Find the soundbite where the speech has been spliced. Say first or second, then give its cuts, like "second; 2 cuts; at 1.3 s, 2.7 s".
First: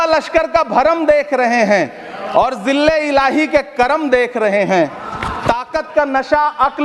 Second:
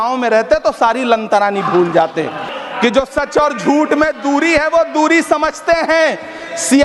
second; 1 cut; at 2.5 s